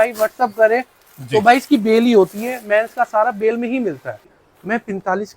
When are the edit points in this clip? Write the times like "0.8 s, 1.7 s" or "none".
4.2 s